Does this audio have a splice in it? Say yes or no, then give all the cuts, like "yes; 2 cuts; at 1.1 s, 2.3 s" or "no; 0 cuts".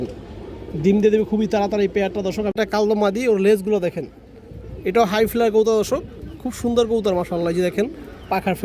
yes; 1 cut; at 2.6 s